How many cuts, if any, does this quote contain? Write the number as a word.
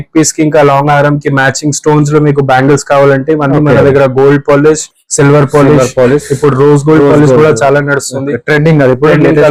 zero